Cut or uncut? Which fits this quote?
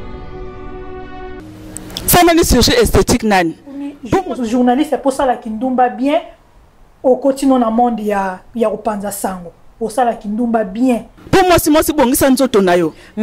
uncut